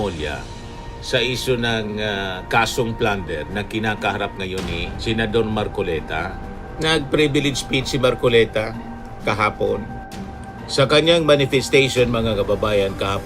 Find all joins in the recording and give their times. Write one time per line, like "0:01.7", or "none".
none